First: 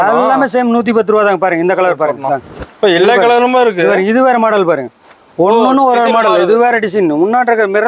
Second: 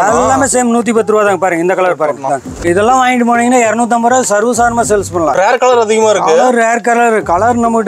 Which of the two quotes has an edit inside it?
second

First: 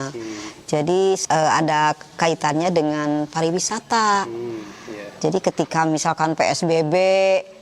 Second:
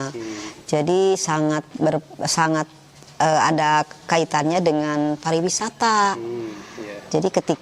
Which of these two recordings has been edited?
first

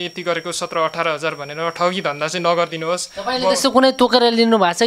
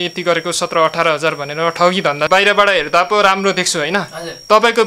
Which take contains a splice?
second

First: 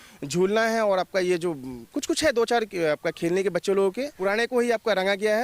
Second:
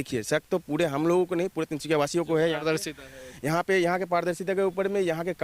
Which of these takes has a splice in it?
first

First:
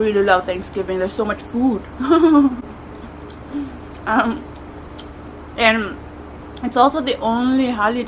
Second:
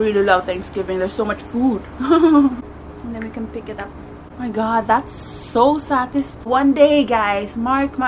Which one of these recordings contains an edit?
second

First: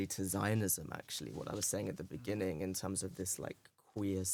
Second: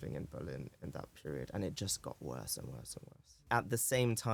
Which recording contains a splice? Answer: second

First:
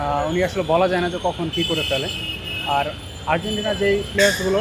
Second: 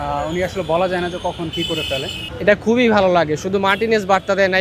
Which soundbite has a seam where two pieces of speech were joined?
second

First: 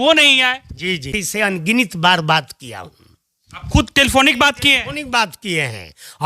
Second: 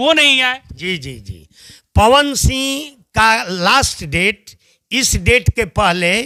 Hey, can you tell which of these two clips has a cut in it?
first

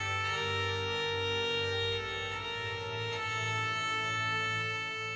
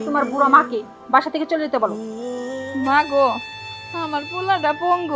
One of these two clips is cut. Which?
second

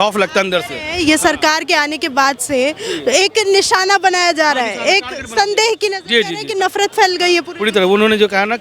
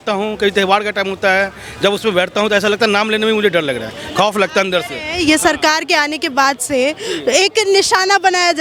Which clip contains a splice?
first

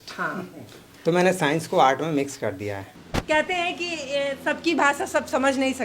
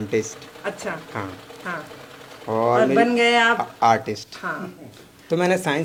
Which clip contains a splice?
first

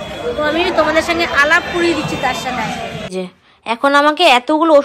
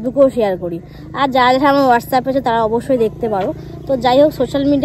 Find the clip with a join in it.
first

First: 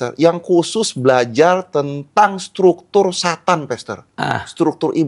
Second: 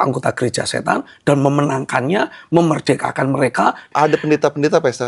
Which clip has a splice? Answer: second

